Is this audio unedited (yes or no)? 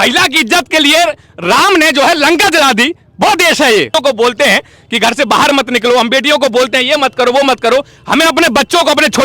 no